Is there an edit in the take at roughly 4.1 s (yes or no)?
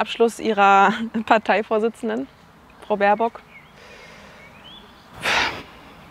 no